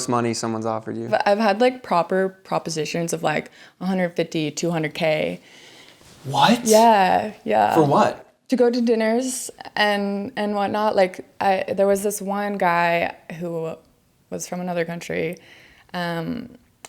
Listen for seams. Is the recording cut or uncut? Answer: cut